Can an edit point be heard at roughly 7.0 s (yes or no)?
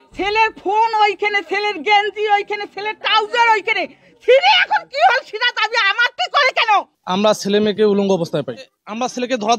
yes